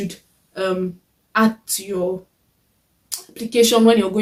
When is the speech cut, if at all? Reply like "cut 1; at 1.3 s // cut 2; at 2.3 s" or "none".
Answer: none

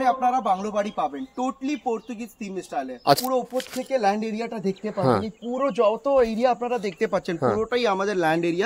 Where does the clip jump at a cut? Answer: cut 1; at 3.2 s

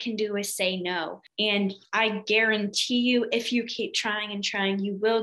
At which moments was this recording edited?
cut 1; at 1.2 s

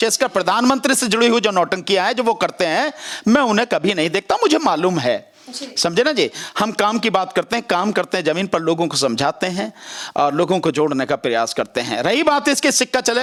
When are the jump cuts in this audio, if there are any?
none

